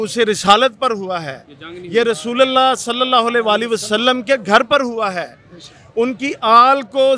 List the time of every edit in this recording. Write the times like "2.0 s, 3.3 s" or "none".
none